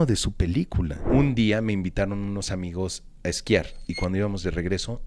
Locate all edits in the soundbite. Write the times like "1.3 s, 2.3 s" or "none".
1.0 s, 3.8 s